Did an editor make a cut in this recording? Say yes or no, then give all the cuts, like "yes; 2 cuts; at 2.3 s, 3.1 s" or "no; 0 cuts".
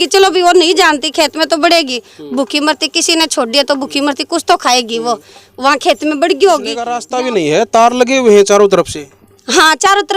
yes; 1 cut; at 7.0 s